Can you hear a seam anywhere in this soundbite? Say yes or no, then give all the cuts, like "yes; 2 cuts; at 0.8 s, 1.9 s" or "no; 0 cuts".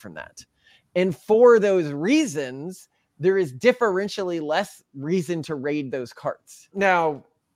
yes; 1 cut; at 6.5 s